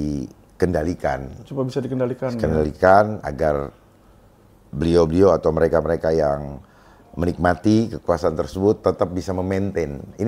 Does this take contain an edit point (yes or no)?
no